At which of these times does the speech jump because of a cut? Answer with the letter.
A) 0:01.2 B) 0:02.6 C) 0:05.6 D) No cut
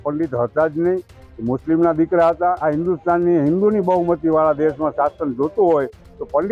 B